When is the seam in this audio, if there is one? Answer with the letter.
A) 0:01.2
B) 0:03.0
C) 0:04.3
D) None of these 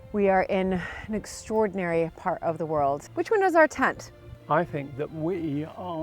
C